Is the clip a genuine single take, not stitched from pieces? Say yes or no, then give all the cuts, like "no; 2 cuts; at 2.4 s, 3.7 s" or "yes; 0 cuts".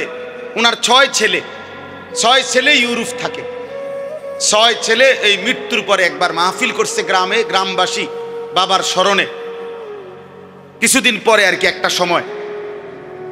yes; 0 cuts